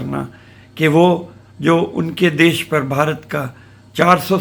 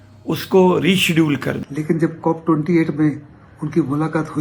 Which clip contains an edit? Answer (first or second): second